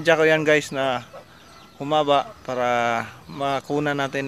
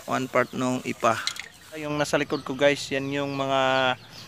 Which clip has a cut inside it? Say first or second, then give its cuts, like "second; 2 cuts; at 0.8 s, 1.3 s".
second; 1 cut; at 1.9 s